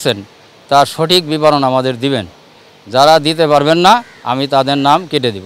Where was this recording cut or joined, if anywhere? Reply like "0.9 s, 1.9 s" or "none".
none